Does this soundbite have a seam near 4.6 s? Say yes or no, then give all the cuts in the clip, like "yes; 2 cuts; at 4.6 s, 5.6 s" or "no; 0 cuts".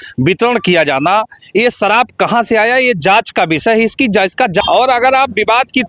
yes; 1 cut; at 4.6 s